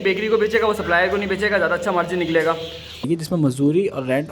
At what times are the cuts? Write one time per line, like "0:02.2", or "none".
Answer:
0:03.0